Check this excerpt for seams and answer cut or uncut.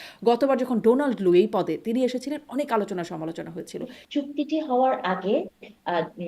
cut